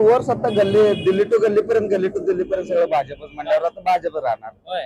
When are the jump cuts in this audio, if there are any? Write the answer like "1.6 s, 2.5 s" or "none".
none